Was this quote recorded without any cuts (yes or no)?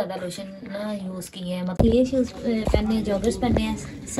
no